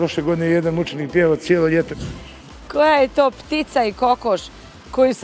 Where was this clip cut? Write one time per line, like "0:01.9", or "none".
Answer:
0:02.0